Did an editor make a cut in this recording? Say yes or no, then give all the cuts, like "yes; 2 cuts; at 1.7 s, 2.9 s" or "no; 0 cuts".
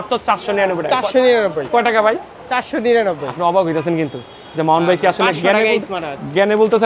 no; 0 cuts